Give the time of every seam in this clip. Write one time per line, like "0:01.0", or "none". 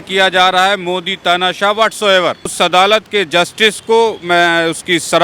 0:02.5